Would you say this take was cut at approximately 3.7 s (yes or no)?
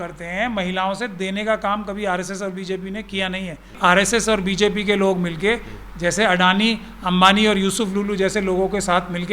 yes